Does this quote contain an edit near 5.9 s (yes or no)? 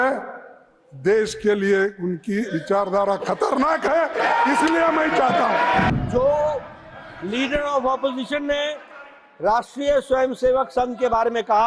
yes